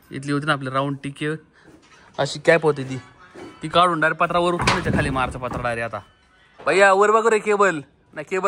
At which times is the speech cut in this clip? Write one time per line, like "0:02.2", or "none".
0:06.6